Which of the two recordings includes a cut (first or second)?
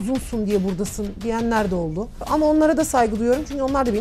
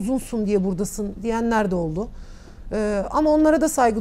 first